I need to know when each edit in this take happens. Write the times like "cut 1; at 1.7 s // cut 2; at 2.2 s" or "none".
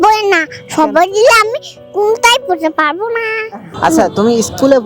cut 1; at 3.6 s